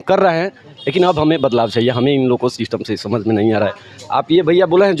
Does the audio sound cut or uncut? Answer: uncut